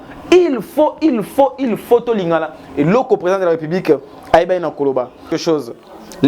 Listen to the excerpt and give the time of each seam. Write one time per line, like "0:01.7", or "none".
0:05.3